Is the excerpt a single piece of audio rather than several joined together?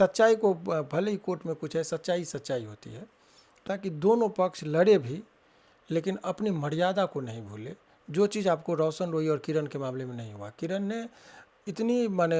no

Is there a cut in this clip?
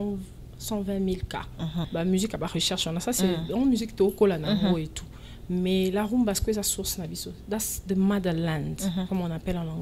yes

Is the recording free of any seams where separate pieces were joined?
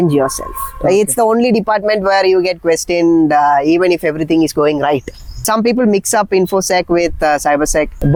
yes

